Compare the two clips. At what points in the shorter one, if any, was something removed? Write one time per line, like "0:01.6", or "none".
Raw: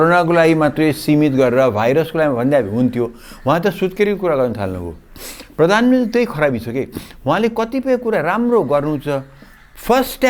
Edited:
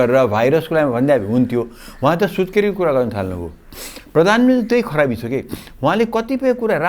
none